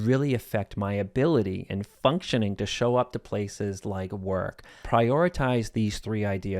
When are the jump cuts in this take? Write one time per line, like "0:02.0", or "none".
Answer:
0:04.7